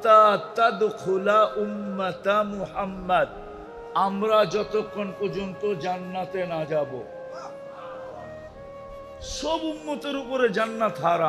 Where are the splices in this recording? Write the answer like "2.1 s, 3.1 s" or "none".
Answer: 7.2 s, 9.3 s

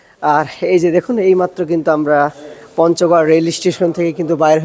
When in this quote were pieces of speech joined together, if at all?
none

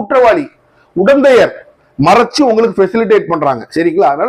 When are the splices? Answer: none

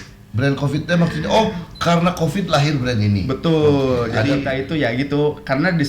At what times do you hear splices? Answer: 4.5 s

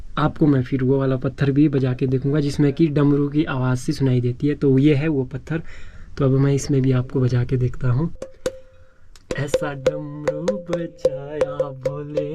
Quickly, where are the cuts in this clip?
8.2 s

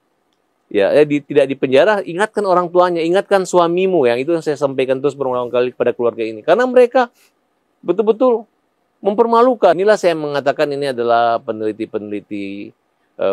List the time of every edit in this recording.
9.8 s

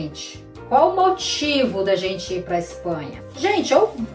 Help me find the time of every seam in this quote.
3.2 s

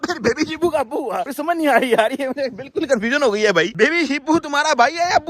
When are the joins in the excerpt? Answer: 3.7 s

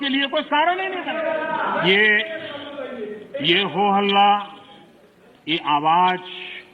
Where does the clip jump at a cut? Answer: 1.0 s

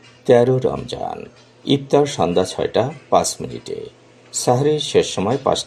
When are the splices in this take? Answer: none

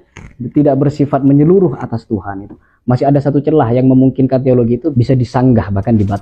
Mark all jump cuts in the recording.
4.9 s

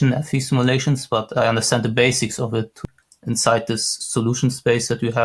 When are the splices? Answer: 2.8 s

